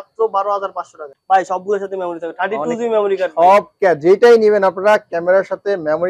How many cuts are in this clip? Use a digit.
1